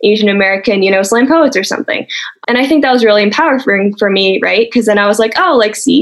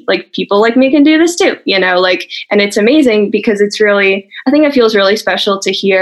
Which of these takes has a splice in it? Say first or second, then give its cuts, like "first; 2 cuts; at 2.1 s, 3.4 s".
first; 1 cut; at 2.4 s